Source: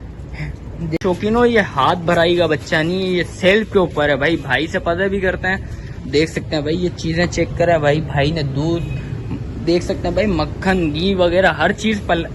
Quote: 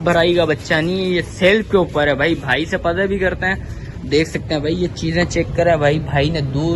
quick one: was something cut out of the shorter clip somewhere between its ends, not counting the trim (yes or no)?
no